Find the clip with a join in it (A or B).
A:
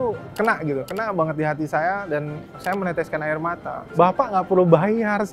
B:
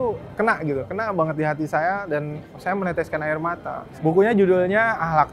A